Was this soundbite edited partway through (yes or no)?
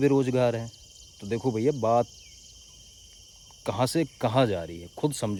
no